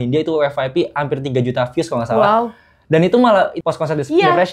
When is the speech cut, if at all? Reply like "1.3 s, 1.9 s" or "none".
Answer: 3.5 s